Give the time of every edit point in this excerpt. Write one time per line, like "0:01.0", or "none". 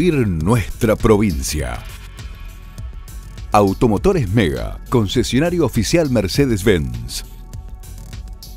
none

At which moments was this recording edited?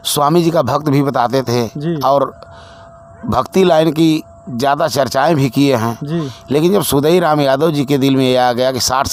none

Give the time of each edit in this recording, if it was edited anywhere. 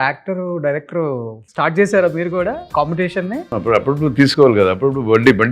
0:01.4
0:02.6
0:03.5

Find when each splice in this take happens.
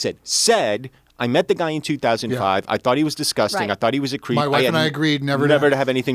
none

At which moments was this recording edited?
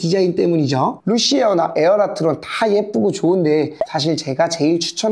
0:01.0

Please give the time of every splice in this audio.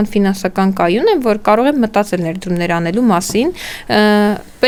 none

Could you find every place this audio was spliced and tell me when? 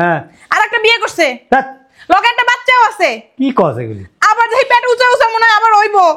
none

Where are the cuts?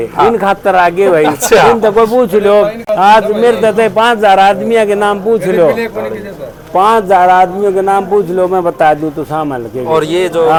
none

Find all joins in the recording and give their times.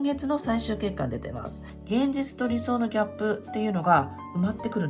0:01.7

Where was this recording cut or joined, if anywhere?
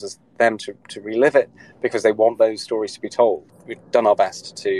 0:03.5

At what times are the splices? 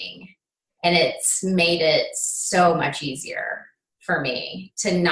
none

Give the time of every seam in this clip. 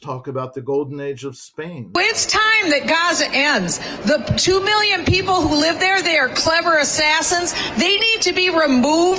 0:01.8

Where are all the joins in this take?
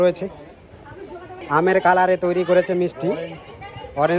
0:01.3

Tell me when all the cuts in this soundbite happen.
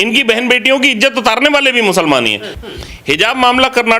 0:02.5

